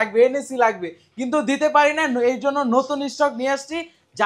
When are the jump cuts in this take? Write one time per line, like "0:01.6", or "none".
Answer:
none

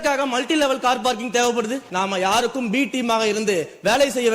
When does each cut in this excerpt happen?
0:01.9

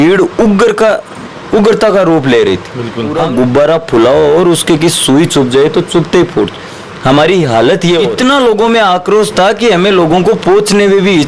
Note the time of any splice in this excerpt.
0:03.2
0:08.1

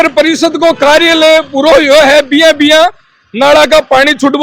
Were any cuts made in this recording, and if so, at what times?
none

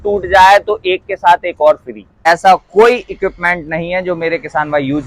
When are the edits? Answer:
0:02.2

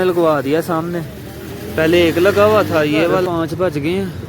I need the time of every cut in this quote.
0:03.3

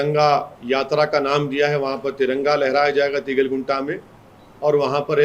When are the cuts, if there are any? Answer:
none

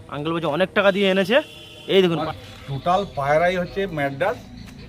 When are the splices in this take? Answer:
0:02.2

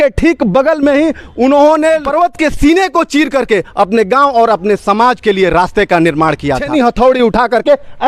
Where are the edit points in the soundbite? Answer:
0:02.1
0:06.6

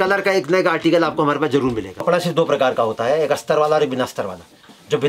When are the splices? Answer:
0:02.0

